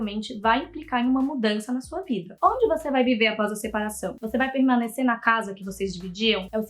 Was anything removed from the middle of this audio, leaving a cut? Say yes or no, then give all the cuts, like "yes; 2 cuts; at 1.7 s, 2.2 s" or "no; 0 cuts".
yes; 1 cut; at 2.3 s